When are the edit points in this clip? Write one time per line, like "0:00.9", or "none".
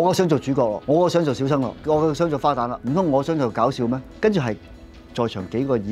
0:00.8
0:01.8
0:02.8
0:04.1

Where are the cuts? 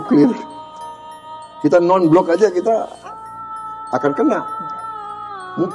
none

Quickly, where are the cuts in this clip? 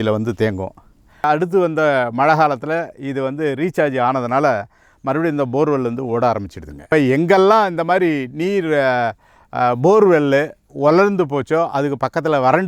0:01.2
0:06.9

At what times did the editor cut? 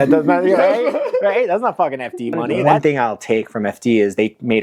0:02.8

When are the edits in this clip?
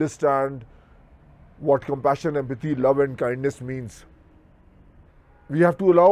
0:05.1

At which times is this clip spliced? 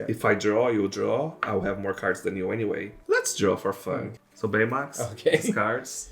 0:02.9
0:04.1

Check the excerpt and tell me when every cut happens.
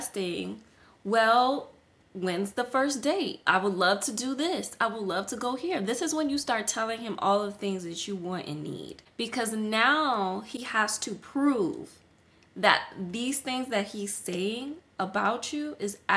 0:09.0
0:10.6

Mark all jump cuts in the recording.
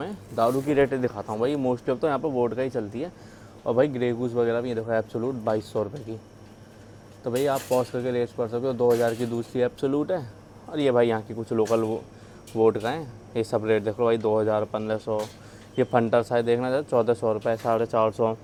none

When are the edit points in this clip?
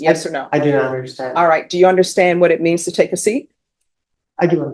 none

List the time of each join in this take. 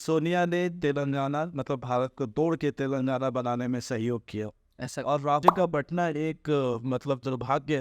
0:05.4

